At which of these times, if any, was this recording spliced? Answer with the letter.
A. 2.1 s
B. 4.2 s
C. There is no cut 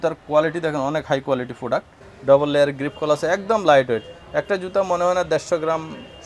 A